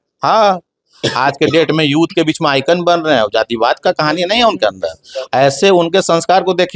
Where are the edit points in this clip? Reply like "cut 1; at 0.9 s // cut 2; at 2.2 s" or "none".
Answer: none